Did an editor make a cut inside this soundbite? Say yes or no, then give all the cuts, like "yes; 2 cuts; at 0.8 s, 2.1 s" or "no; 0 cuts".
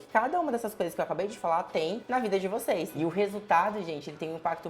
yes; 1 cut; at 2.9 s